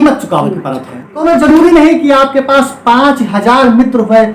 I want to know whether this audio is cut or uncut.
cut